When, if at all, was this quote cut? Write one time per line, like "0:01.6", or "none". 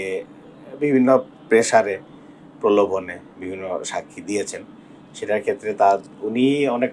none